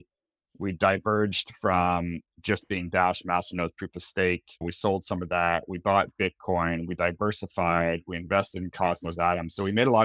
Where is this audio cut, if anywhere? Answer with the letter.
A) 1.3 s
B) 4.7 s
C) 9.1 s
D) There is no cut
B